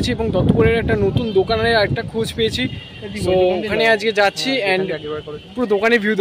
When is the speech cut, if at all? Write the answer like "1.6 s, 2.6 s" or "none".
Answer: none